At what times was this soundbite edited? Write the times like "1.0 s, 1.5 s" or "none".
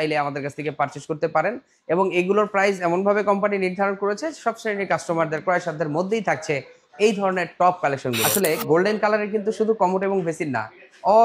8.2 s